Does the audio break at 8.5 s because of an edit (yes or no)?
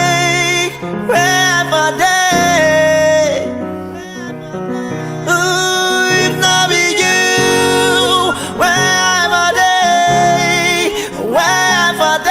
no